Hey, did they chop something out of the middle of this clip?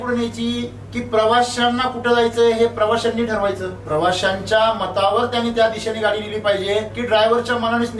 yes; 2 cuts; at 3.7 s, 6.9 s

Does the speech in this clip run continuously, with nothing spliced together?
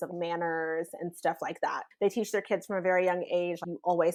yes; 0 cuts

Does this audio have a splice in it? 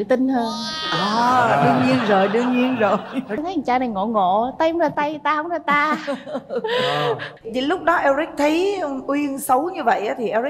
yes; 2 cuts; at 3.4 s, 7.3 s

